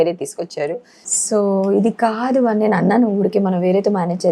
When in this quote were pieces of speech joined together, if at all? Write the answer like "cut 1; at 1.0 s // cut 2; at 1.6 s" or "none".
none